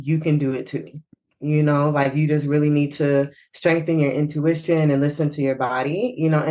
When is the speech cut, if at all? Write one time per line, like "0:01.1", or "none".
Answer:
none